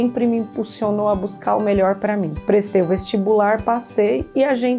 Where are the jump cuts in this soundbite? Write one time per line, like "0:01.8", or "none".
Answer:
0:02.3